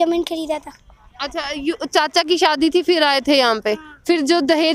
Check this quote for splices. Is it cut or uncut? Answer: uncut